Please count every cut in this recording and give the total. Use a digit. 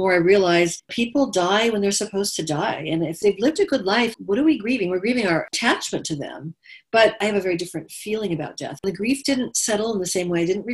6